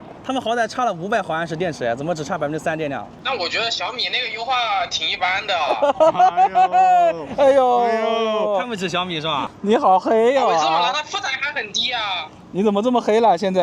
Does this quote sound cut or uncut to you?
cut